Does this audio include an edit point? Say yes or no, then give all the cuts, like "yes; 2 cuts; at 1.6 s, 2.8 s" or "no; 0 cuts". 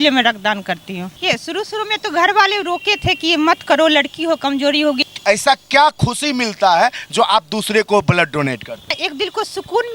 yes; 3 cuts; at 1.2 s, 5.0 s, 9.0 s